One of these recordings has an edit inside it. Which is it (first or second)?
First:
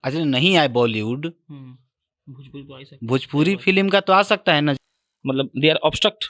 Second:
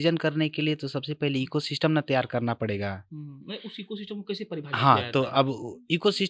first